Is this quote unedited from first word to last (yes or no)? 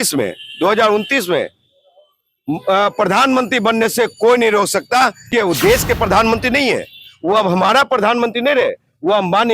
no